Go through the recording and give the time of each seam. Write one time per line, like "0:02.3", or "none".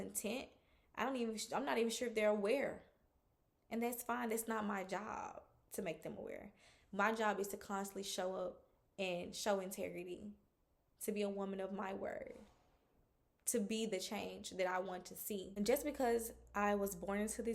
0:15.5